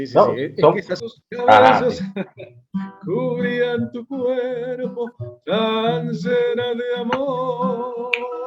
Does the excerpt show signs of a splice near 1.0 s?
yes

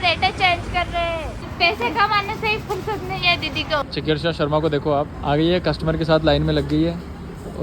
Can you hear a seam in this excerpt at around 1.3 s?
yes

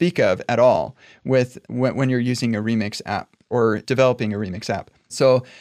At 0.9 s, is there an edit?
no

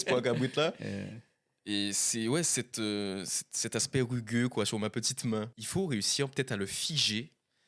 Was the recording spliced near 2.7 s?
no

